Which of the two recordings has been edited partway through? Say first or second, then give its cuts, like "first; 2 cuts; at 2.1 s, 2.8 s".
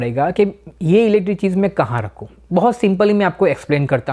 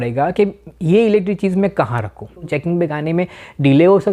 second; 1 cut; at 2.5 s